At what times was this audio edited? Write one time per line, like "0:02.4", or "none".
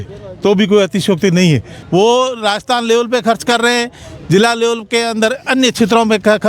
0:01.7